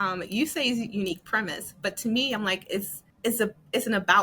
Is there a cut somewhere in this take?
yes; 1 cut; at 3.0 s

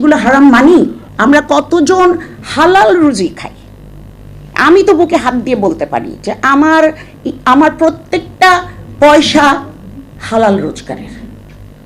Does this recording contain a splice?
yes; 1 cut; at 1.0 s

